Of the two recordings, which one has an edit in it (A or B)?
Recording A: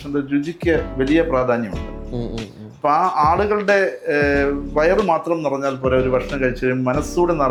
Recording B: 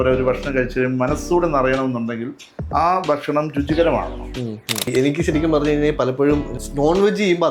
B